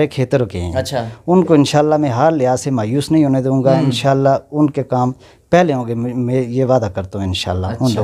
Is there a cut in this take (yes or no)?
no